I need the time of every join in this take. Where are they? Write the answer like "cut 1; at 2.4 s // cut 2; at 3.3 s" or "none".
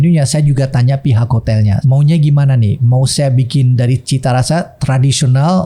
cut 1; at 1.8 s